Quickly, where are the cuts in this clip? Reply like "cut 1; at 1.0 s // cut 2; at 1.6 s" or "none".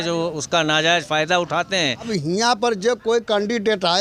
cut 1; at 2.1 s

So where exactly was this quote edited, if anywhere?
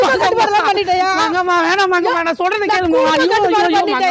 none

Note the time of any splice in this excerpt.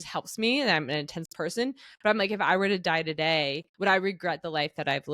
cut 1; at 3.6 s

